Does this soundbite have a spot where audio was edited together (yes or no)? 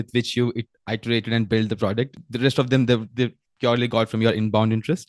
yes